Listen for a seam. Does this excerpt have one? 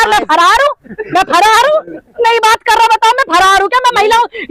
no; 0 cuts

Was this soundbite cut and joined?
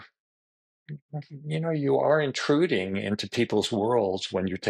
no; 0 cuts

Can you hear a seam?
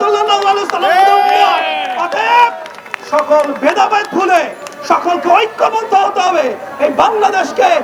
no; 0 cuts

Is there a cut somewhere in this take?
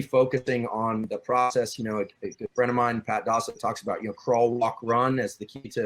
no; 0 cuts

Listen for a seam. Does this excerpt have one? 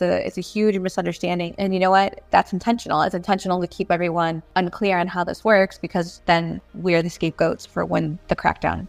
yes; 5 cuts; at 1.5 s, 2.3 s, 4.4 s, 6.1 s, 7.6 s

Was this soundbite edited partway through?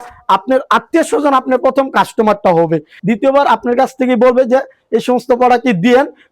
yes; 1 cut; at 2.9 s

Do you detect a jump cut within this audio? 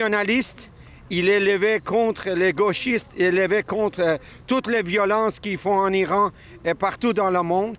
no; 0 cuts

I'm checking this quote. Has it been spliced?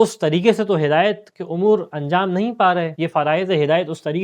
no; 0 cuts

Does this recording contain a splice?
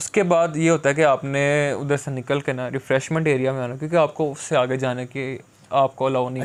no; 0 cuts

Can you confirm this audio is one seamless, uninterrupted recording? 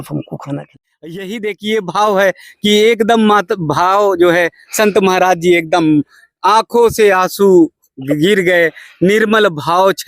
no; 1 cut; at 1.3 s

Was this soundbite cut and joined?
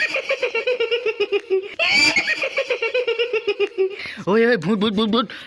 yes; 2 cuts; at 1.8 s, 4.1 s

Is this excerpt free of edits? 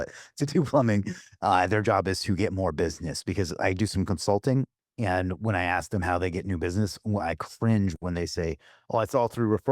no; 1 cut; at 4.8 s

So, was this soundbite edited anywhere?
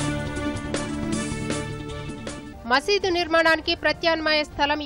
yes; 1 cut; at 2.5 s

